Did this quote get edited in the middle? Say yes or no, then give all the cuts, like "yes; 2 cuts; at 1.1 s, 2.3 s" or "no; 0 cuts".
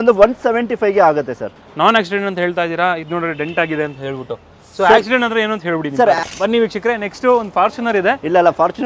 yes; 2 cuts; at 1.6 s, 6.2 s